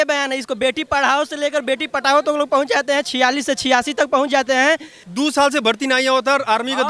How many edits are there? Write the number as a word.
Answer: one